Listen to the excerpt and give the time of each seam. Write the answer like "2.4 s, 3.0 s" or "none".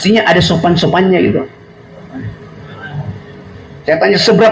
none

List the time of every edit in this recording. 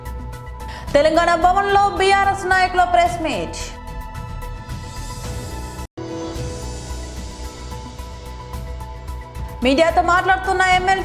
5.9 s, 8.3 s, 9.6 s

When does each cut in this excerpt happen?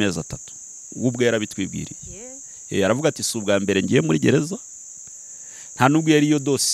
none

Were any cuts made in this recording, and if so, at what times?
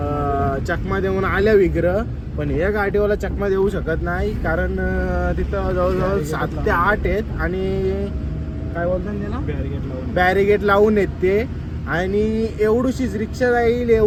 none

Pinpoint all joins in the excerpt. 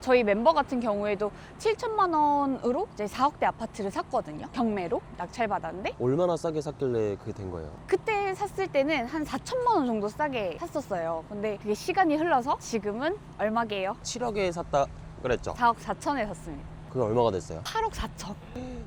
none

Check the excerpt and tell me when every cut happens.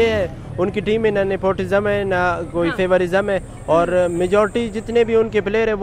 none

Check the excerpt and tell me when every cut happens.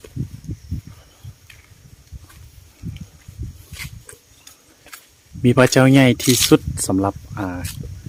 none

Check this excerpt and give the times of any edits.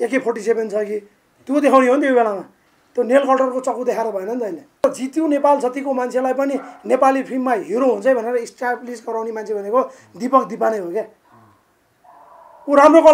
4.8 s

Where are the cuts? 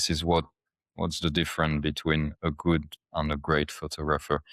none

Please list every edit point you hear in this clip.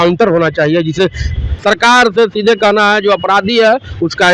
1.5 s

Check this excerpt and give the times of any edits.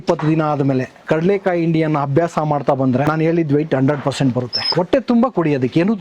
0.9 s, 3.0 s, 4.6 s

